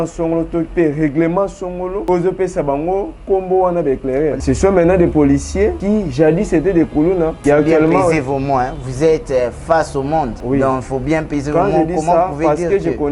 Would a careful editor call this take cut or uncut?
cut